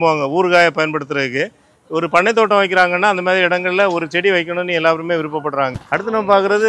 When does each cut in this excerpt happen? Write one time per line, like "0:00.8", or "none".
0:05.7